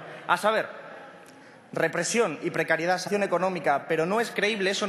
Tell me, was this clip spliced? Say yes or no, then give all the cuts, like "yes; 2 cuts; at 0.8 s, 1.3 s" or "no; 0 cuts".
no; 0 cuts